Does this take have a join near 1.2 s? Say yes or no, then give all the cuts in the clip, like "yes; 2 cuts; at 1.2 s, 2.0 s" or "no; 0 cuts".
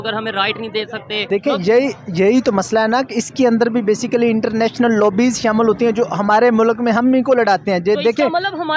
yes; 1 cut; at 1.2 s